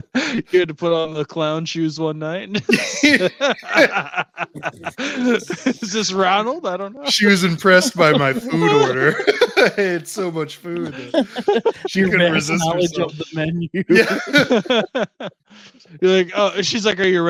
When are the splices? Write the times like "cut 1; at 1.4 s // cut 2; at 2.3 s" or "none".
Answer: none

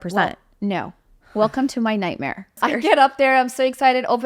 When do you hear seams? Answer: cut 1; at 2.5 s

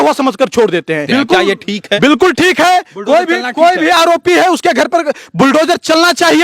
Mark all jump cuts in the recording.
cut 1; at 1.0 s

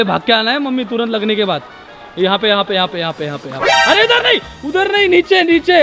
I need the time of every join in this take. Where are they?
none

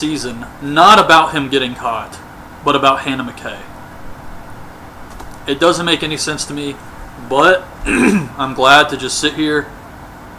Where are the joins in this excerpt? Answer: none

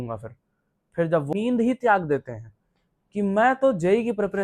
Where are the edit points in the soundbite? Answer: cut 1; at 1.3 s

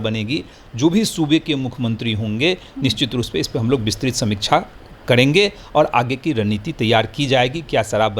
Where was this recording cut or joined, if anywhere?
none

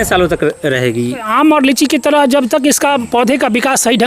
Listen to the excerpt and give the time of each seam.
cut 1; at 1.3 s

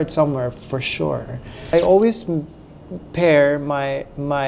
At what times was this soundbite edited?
cut 1; at 1.7 s

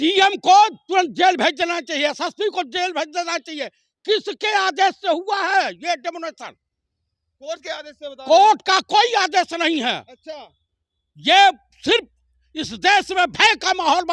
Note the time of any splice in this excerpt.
none

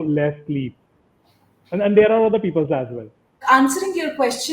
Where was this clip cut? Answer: none

